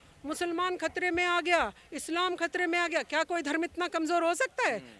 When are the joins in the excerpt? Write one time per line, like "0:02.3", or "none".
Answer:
none